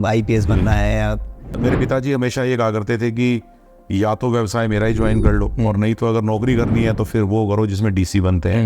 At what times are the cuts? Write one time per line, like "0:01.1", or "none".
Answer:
0:01.6